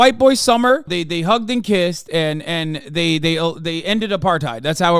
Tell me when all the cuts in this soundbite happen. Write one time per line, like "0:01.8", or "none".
0:00.9